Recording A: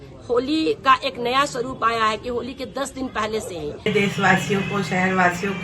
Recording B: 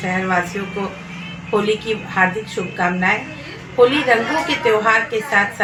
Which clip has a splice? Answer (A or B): A